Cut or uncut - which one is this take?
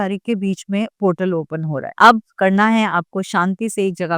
cut